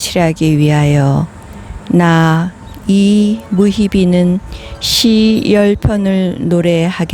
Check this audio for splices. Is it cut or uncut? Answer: uncut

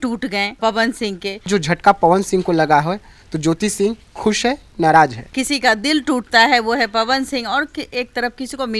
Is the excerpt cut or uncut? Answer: cut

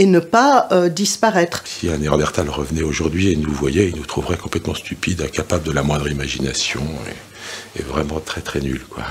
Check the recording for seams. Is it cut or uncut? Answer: cut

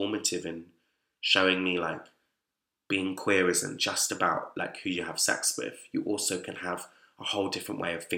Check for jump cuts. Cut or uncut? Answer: uncut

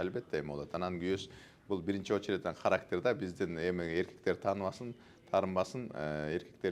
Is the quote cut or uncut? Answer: uncut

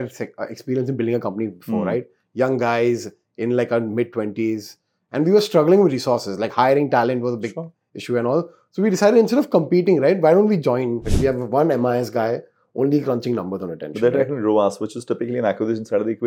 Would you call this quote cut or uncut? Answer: cut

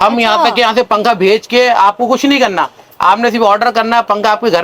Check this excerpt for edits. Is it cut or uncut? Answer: uncut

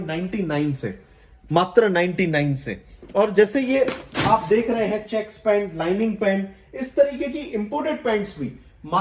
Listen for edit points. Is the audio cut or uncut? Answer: uncut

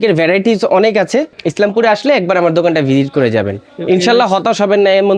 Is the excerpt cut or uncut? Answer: cut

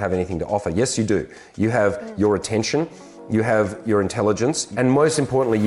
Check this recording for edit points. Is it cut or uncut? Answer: cut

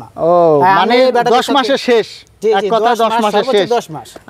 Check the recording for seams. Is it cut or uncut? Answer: uncut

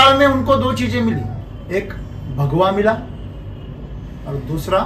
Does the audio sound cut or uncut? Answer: uncut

